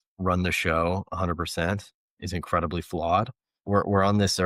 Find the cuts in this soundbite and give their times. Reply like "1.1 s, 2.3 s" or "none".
2.1 s, 3.6 s